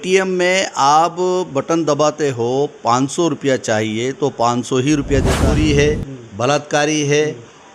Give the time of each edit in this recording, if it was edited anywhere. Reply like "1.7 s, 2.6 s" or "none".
5.5 s